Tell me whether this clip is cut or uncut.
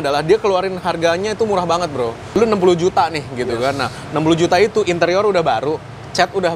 cut